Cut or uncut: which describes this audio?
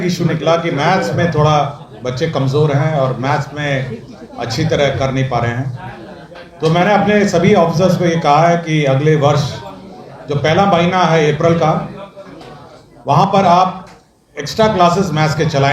uncut